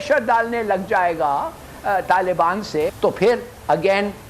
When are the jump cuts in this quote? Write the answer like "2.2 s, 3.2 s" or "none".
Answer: 2.9 s